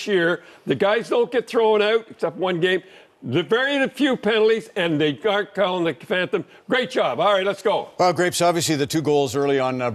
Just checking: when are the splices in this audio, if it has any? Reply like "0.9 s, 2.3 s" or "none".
3.7 s